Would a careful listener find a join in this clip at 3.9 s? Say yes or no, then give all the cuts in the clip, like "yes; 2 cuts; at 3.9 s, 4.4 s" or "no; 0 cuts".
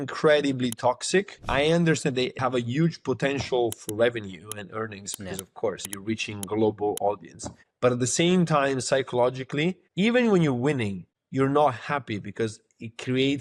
no; 3 cuts; at 1.4 s, 2.4 s, 5.9 s